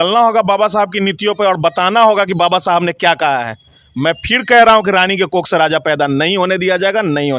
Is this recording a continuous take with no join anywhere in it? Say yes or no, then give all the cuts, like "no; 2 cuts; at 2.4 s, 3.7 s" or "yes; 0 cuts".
yes; 0 cuts